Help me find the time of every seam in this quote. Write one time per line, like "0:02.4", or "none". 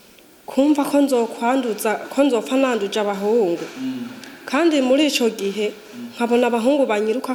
none